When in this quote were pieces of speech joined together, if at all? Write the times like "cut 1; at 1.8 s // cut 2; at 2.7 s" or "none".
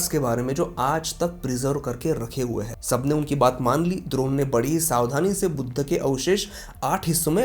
cut 1; at 2.7 s